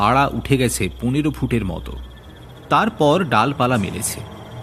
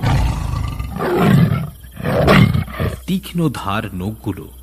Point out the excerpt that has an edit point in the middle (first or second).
second